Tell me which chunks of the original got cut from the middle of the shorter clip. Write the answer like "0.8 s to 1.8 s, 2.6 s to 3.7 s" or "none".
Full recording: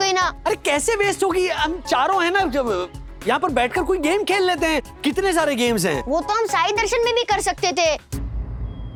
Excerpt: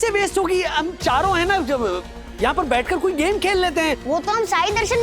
4.9 s to 6.0 s